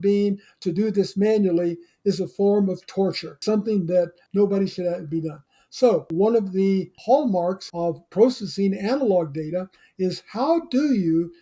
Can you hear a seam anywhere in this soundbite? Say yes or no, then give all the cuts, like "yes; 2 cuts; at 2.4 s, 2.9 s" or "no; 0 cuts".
yes; 2 cuts; at 6.1 s, 7.7 s